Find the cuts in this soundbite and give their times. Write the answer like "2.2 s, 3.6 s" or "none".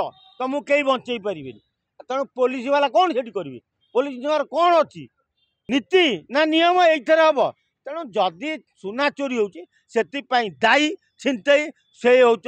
5.6 s